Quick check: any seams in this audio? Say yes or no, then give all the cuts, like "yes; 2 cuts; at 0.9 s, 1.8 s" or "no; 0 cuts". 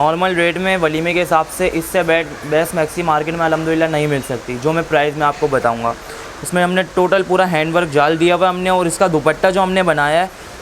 no; 0 cuts